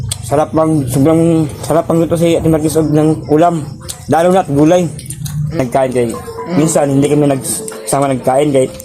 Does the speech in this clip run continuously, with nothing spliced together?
no; 1 cut; at 5.6 s

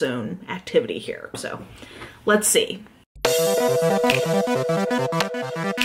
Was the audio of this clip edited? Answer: no; 0 cuts

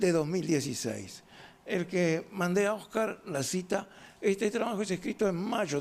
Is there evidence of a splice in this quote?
yes; 1 cut; at 2.4 s

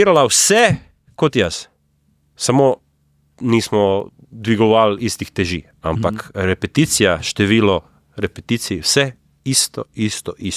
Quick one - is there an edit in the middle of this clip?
no; 0 cuts

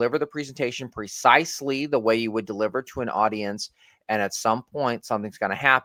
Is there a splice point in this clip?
no; 0 cuts

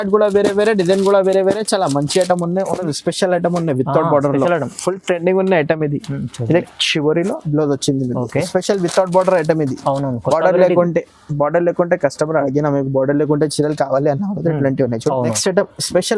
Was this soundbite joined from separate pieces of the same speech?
yes; 2 cuts; at 2.9 s, 15.4 s

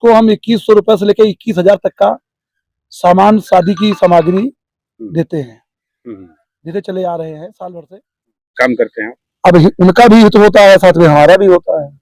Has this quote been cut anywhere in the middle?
yes; 1 cut; at 8.6 s

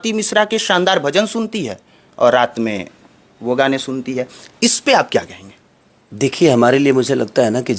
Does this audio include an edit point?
no; 0 cuts

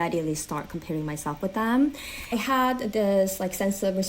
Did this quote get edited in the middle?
yes; 1 cut; at 2.3 s

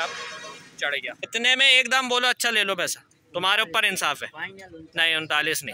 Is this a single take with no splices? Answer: no; 1 cut; at 1.3 s

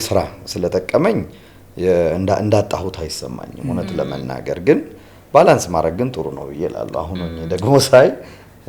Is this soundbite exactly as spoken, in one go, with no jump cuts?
yes; 0 cuts

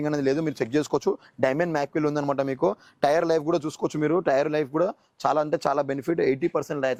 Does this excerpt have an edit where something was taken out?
no; 0 cuts

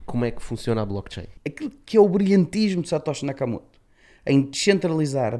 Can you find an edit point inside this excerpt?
yes; 1 cut; at 1.3 s

